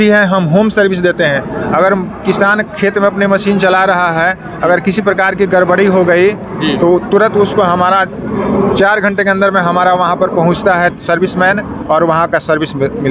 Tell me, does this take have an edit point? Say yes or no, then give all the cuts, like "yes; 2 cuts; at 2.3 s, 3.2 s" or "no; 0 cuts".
no; 0 cuts